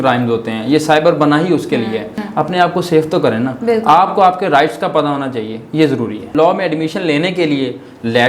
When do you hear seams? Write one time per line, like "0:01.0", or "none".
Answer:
0:02.2
0:06.3